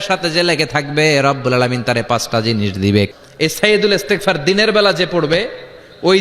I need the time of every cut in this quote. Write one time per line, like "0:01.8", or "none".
0:03.1